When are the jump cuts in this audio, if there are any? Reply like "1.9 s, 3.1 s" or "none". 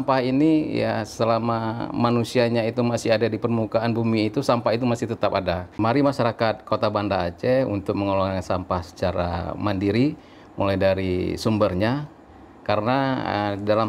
5.8 s